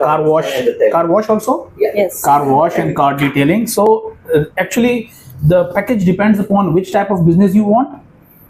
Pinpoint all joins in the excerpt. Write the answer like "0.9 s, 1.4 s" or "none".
none